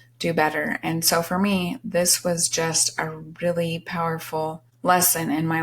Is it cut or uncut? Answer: cut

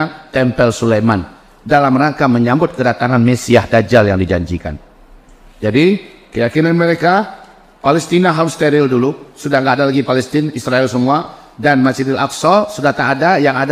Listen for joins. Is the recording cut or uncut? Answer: uncut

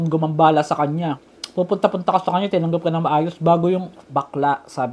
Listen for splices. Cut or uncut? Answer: cut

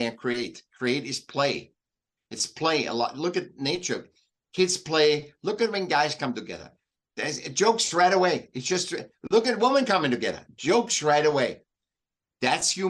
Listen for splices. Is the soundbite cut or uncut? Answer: uncut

